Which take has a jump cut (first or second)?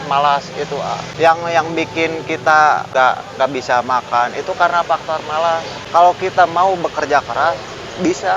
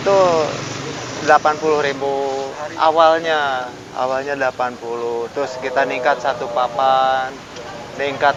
first